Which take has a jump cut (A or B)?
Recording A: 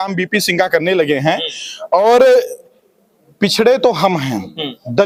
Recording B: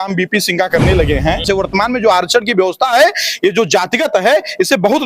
B